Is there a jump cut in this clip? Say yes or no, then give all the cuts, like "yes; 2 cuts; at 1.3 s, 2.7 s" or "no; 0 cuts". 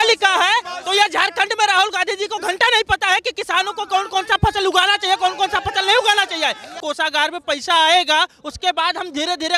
yes; 1 cut; at 6.8 s